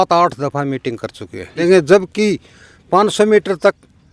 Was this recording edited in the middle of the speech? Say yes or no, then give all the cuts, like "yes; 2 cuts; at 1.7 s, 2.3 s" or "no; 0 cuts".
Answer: yes; 1 cut; at 1.6 s